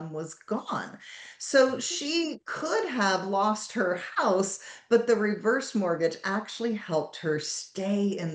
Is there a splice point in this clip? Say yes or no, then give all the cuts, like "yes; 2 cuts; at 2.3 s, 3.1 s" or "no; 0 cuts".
no; 0 cuts